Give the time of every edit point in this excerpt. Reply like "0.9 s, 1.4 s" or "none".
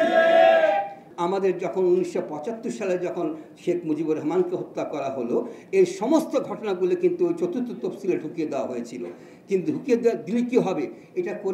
1.0 s